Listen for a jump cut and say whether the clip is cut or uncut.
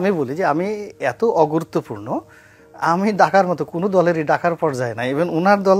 uncut